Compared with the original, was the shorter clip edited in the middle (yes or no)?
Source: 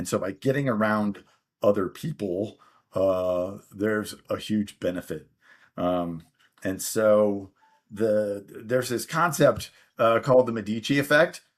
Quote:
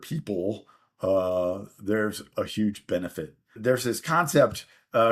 yes